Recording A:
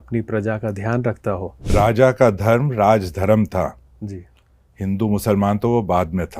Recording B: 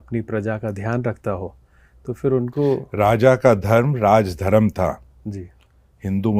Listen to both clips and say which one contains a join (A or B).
A